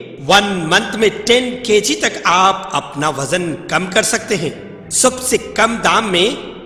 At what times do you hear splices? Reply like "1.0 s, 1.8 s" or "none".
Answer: none